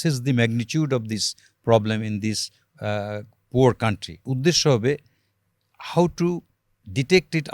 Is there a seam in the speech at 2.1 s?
no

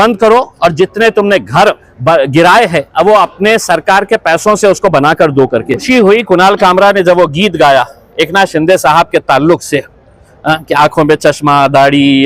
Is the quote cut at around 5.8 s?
yes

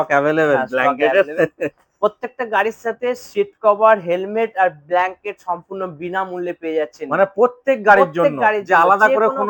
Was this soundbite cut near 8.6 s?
no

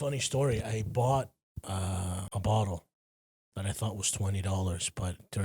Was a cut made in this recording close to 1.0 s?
no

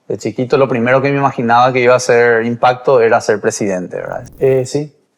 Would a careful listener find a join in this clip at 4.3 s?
yes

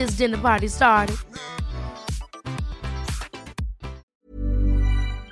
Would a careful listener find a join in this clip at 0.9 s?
no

